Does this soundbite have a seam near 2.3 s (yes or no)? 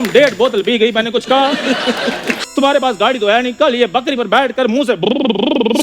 yes